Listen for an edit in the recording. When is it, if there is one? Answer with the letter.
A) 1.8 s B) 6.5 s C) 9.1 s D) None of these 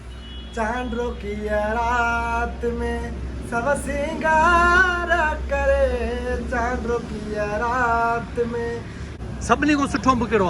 C